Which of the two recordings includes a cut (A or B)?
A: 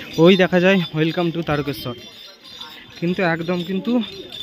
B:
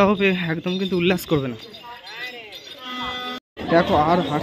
B